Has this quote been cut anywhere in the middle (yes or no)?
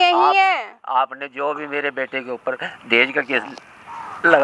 no